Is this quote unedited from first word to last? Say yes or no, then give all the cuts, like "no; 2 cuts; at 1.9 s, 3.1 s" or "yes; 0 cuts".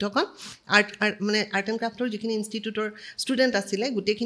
yes; 0 cuts